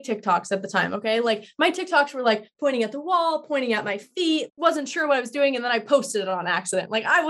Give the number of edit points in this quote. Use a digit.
1